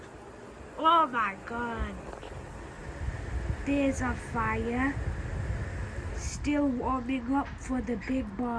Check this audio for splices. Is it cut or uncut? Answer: uncut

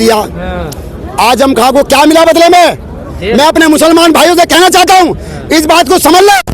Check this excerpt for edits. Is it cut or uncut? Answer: uncut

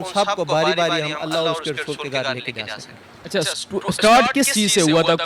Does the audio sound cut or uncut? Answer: uncut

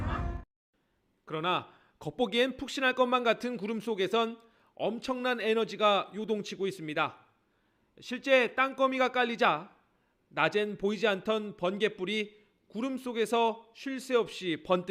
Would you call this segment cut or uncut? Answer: uncut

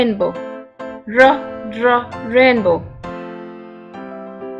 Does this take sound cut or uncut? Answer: uncut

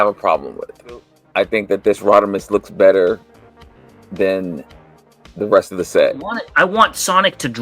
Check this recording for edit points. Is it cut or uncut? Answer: cut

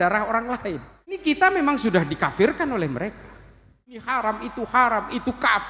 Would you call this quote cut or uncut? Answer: cut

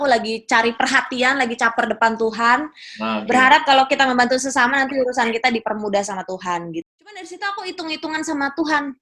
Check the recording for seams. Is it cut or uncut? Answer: cut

